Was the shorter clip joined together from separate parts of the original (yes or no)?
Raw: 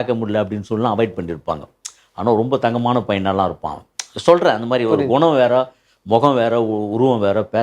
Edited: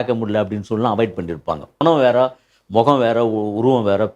yes